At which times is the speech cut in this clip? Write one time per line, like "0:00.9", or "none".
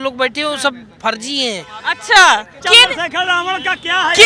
0:02.6